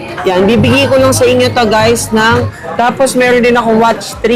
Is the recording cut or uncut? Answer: cut